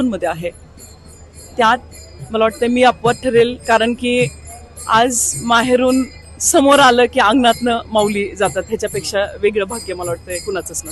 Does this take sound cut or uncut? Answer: uncut